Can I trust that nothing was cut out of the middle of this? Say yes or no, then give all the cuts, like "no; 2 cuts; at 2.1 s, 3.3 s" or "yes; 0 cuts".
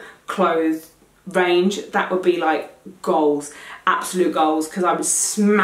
yes; 0 cuts